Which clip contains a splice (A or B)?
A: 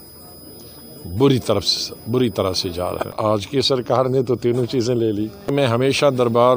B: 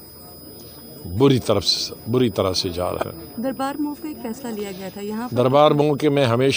A